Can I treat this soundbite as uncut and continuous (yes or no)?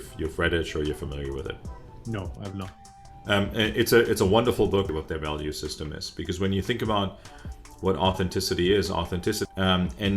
no